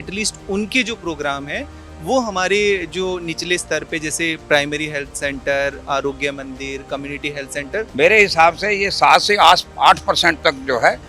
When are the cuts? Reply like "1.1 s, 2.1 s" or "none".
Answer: 7.9 s